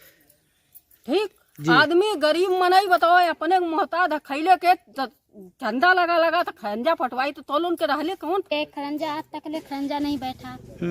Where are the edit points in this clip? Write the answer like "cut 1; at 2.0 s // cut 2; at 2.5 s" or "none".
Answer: cut 1; at 8.5 s